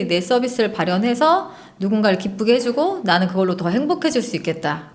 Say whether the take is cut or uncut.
uncut